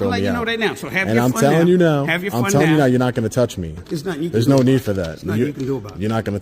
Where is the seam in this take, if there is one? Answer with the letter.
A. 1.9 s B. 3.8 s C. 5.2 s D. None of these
B